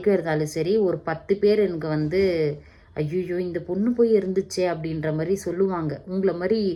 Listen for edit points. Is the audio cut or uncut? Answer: uncut